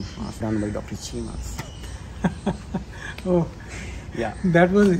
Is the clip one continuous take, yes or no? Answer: yes